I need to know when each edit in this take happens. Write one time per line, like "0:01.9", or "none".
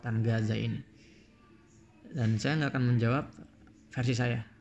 none